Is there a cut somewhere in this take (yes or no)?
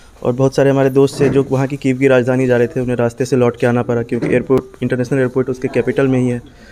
no